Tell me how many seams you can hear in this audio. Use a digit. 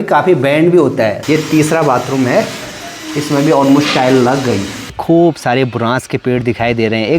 2